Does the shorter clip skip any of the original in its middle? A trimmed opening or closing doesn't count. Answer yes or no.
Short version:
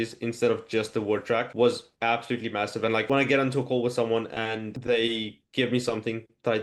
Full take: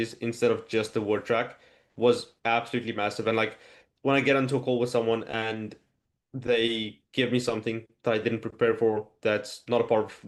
yes